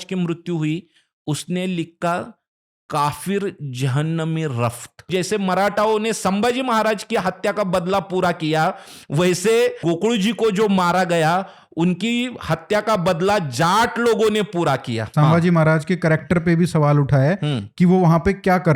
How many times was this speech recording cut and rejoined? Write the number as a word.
three